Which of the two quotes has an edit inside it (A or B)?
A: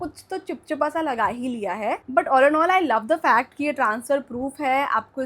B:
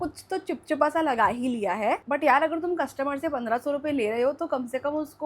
B